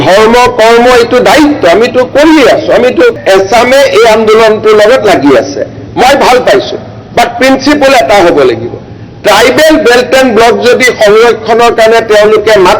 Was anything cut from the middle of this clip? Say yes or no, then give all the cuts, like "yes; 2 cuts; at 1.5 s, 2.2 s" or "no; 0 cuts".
yes; 1 cut; at 3.2 s